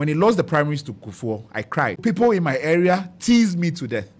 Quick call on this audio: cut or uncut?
cut